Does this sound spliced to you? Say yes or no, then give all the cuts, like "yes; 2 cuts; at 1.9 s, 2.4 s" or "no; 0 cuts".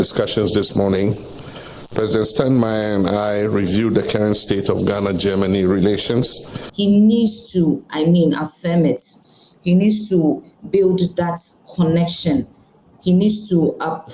yes; 1 cut; at 6.6 s